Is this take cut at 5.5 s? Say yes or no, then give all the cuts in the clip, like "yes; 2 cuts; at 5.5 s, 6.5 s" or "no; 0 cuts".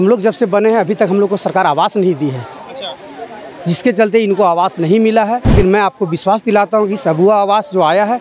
yes; 1 cut; at 5.5 s